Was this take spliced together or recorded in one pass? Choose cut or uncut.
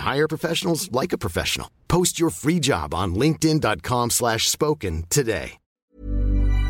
cut